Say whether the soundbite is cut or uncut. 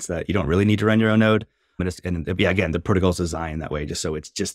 uncut